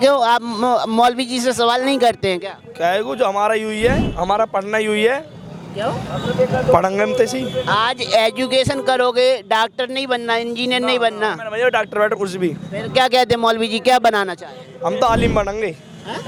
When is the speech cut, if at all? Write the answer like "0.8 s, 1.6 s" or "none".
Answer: none

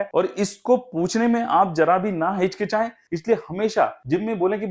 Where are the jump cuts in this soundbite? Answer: 3.0 s

